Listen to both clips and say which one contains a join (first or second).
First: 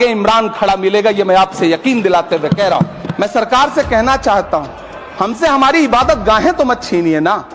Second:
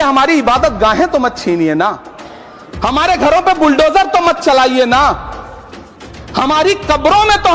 first